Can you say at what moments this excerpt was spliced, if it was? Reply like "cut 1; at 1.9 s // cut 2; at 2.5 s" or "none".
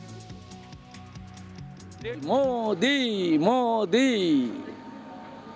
cut 1; at 2.2 s